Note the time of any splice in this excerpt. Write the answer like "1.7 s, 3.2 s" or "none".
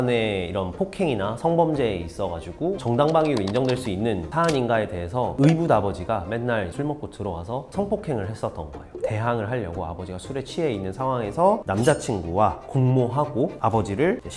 none